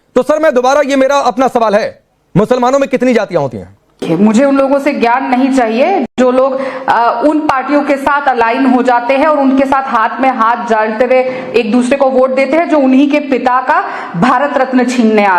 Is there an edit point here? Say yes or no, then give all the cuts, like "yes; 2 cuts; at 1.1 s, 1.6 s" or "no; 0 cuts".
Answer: yes; 1 cut; at 4.0 s